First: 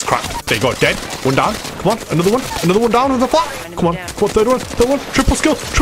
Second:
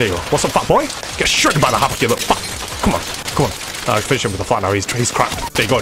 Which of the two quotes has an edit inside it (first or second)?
first